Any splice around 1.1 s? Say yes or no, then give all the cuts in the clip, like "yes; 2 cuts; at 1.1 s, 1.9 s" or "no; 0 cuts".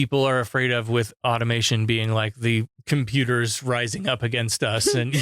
no; 1 cut; at 2.8 s